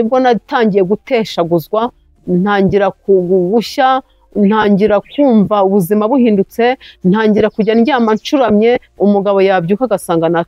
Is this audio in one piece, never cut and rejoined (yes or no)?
yes